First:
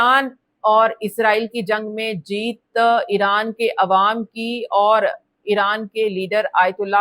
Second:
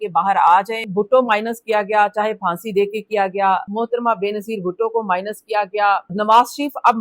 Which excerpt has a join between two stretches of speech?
second; 3 cuts; at 0.9 s, 3.7 s, 6.1 s

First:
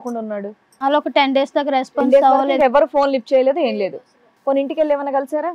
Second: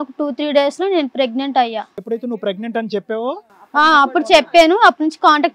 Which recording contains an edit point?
second; 1 cut; at 1.9 s

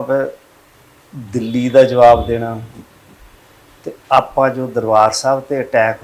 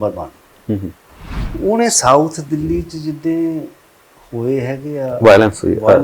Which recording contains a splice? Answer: second; 1 cut; at 1.4 s

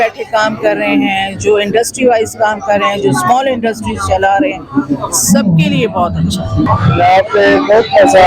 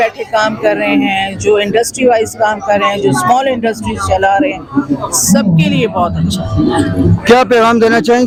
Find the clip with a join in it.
first; 1 cut; at 6.7 s

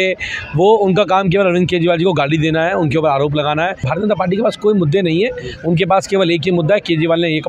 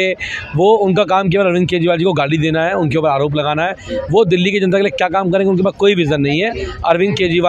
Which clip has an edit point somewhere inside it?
first; 1 cut; at 3.9 s

